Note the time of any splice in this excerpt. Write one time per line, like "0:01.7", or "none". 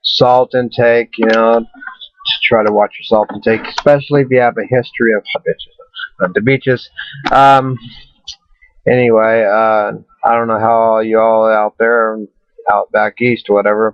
none